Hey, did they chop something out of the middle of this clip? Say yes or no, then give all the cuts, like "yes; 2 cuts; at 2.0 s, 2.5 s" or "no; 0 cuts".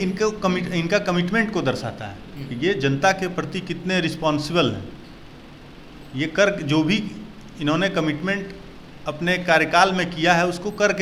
no; 0 cuts